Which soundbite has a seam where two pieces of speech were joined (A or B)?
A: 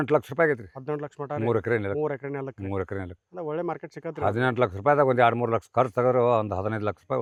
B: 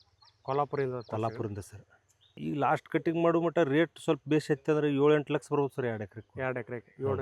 B